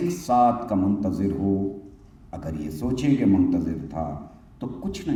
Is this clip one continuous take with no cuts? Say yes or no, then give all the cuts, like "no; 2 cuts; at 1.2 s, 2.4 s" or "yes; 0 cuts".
yes; 0 cuts